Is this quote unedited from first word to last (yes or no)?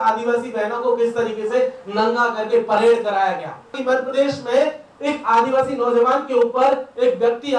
no